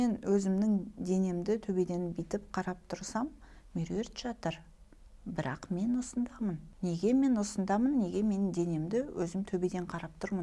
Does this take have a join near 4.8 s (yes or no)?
no